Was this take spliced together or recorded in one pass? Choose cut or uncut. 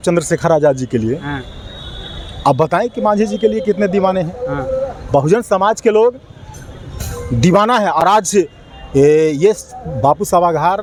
uncut